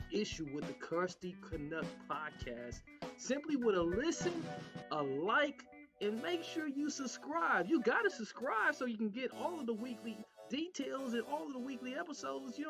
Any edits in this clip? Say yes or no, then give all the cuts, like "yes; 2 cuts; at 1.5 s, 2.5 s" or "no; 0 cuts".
no; 0 cuts